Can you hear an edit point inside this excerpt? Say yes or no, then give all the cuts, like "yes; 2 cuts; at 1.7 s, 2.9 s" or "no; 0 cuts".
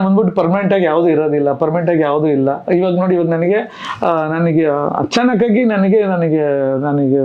no; 0 cuts